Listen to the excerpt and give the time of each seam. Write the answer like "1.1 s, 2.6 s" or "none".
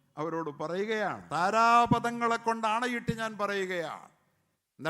1.2 s